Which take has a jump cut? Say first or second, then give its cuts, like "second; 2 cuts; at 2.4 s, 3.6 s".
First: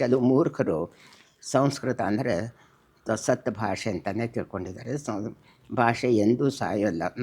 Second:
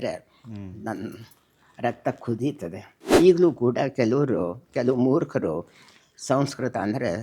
second; 1 cut; at 2.9 s